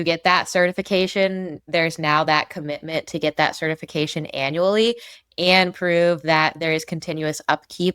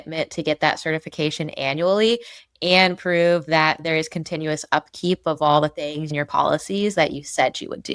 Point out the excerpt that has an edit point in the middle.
second; 1 cut; at 6.1 s

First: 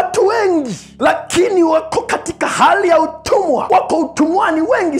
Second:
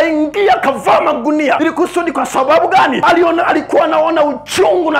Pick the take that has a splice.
second; 2 cuts; at 1.6 s, 3.0 s

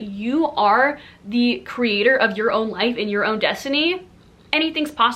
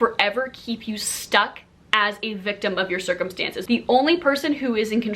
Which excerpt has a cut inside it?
second; 1 cut; at 3.5 s

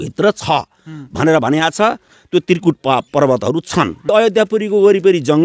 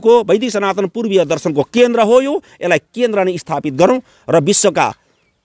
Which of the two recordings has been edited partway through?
first; 2 cuts; at 2.1 s, 4.1 s

